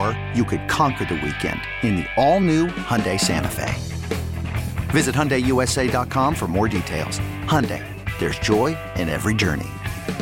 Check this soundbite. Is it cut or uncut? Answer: uncut